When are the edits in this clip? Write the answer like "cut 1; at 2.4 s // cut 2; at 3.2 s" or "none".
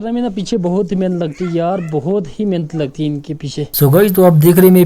cut 1; at 3.7 s